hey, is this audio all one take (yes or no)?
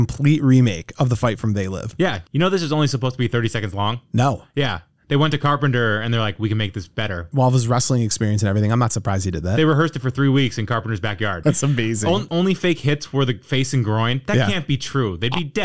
no